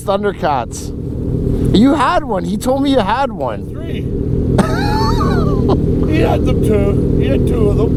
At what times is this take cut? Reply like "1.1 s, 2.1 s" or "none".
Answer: none